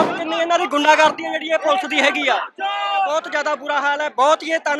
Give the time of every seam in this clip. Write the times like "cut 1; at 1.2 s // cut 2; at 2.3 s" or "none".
cut 1; at 3.1 s